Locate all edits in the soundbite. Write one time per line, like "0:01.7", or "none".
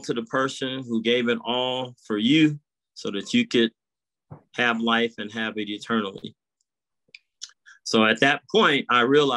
none